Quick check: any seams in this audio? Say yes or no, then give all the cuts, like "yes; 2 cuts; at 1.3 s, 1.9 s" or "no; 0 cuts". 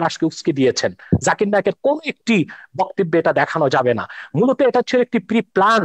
no; 0 cuts